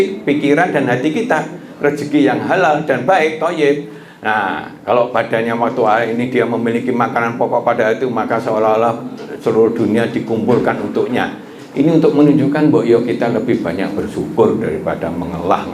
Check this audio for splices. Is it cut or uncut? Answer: uncut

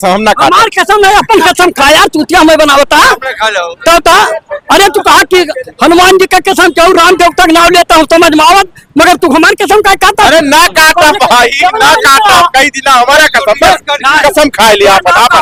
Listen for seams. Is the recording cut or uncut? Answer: uncut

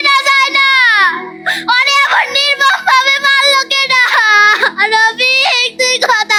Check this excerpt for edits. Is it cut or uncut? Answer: uncut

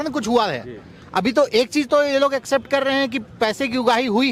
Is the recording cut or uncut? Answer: uncut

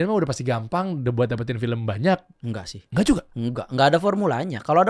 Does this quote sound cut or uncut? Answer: uncut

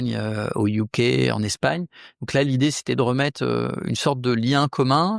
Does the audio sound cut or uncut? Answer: uncut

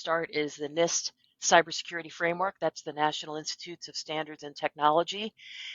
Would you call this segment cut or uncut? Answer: uncut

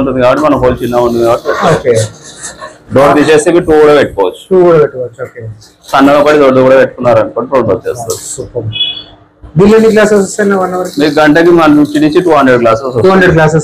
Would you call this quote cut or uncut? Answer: uncut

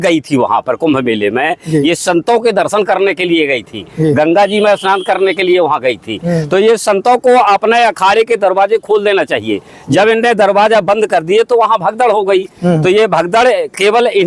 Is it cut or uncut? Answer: uncut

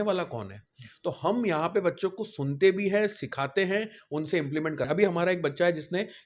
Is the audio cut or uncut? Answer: cut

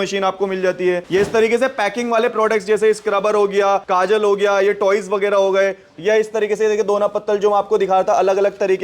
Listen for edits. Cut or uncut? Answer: cut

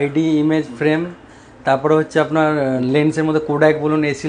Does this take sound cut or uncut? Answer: uncut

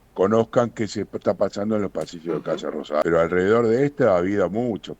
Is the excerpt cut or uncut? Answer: cut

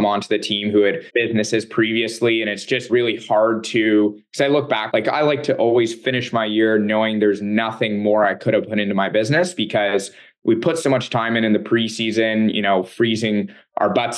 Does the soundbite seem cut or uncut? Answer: cut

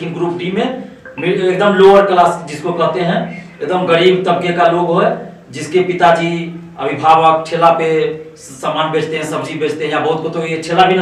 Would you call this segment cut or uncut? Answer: uncut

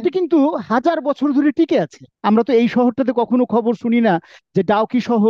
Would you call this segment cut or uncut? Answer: cut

